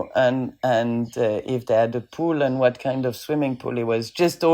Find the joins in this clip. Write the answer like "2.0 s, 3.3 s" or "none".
none